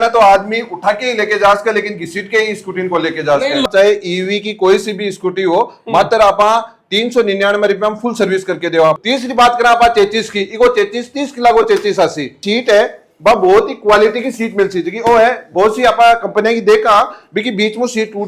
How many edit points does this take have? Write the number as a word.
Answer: three